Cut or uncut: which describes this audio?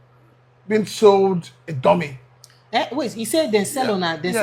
uncut